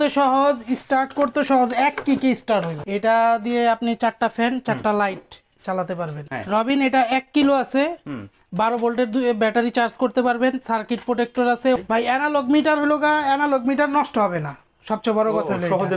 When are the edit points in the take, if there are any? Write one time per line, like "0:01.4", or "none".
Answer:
0:02.8
0:06.2
0:11.8